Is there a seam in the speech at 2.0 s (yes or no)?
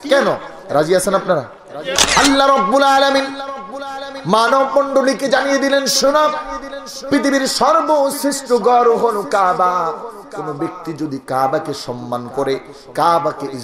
yes